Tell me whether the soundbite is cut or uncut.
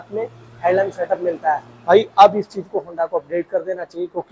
uncut